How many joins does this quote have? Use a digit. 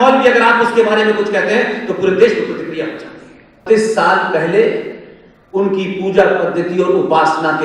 1